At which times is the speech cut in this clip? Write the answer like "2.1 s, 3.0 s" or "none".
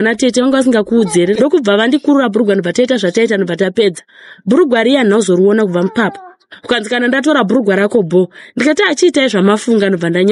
1.4 s, 6.5 s

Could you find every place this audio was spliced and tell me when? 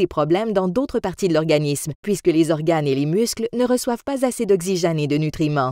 1.6 s

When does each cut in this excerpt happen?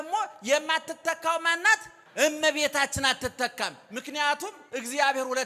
2.0 s

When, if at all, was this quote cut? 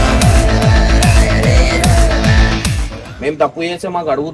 2.9 s

